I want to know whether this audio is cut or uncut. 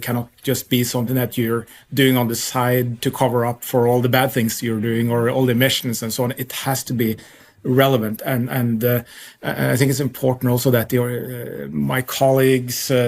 uncut